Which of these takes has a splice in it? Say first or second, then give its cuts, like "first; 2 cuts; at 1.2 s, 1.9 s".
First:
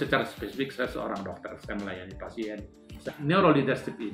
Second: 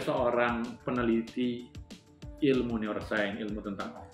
first; 1 cut; at 3.1 s